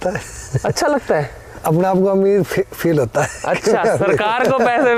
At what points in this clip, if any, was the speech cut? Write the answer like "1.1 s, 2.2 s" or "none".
none